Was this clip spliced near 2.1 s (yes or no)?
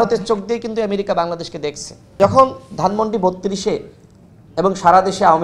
yes